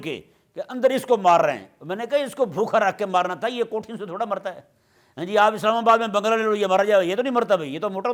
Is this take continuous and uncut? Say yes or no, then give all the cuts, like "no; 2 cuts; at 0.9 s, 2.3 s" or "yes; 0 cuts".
yes; 0 cuts